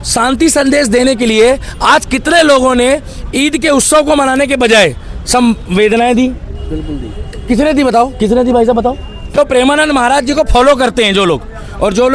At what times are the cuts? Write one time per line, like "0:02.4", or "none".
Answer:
0:09.3